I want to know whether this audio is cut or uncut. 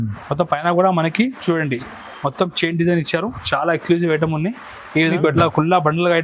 cut